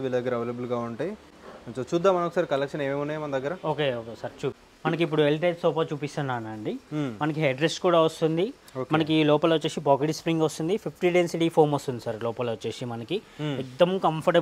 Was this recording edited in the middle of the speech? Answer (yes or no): no